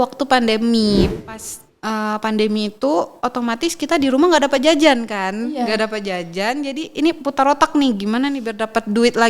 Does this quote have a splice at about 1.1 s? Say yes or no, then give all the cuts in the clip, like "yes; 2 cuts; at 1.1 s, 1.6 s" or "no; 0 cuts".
yes; 1 cut; at 1.1 s